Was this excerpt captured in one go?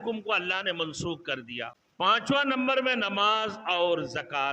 no; 1 cut; at 1.8 s

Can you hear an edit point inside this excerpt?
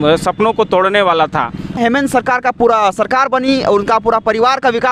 yes; 1 cut; at 1.8 s

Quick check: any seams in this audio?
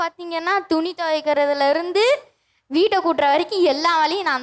no; 0 cuts

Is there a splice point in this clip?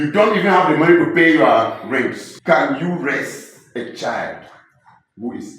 yes; 1 cut; at 2.3 s

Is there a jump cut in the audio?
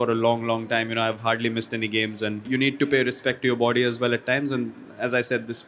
yes; 1 cut; at 2.5 s

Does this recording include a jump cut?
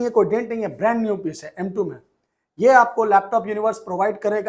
no; 0 cuts

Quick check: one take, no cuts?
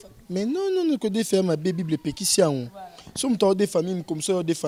yes; 0 cuts

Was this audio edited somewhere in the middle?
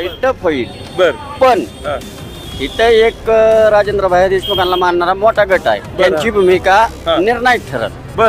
no; 0 cuts

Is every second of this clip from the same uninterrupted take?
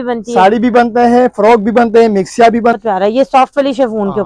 no; 1 cut; at 2.8 s

